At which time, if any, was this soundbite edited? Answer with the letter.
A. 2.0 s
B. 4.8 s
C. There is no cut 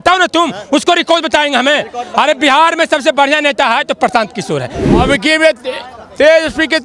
B